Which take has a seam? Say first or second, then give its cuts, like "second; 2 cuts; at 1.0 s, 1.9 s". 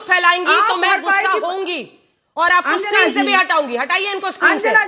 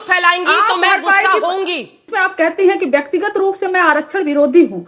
second; 1 cut; at 2.2 s